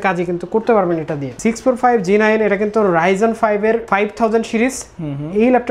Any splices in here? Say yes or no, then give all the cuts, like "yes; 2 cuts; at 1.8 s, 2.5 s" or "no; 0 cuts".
yes; 1 cut; at 1.3 s